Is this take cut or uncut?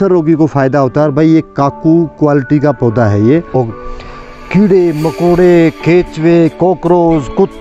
cut